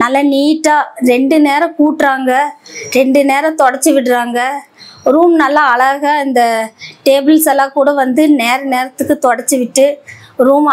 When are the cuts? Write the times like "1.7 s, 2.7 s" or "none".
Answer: none

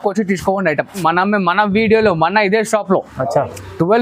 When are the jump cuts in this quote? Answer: 1.0 s

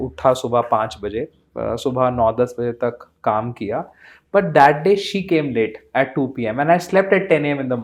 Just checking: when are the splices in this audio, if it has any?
none

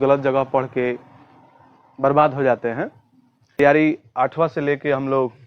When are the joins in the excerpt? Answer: 3.6 s

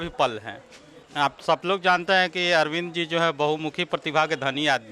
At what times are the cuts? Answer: 1.0 s

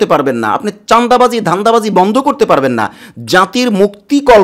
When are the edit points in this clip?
none

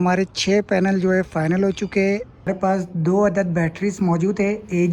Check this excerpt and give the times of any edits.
2.5 s

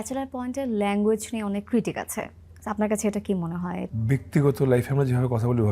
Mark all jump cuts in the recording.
3.8 s

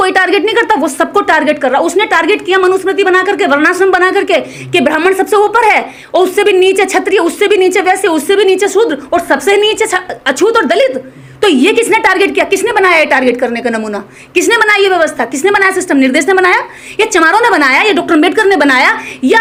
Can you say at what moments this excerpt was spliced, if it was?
none

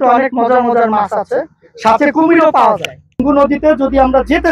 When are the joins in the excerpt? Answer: 3.2 s

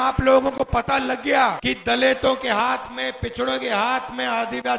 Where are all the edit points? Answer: 1.6 s

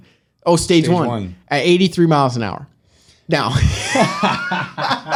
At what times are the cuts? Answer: none

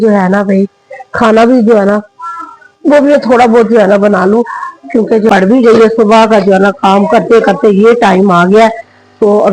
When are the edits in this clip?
5.3 s

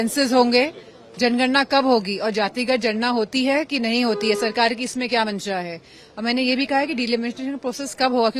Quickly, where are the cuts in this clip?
none

